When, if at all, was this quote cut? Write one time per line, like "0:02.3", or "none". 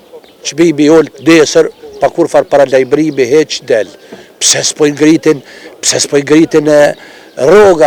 none